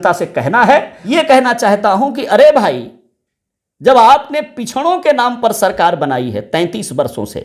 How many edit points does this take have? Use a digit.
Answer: 1